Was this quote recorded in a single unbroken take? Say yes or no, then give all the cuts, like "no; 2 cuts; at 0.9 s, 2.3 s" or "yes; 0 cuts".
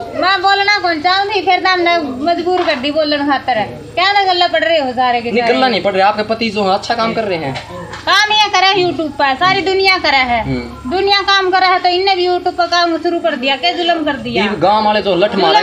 yes; 0 cuts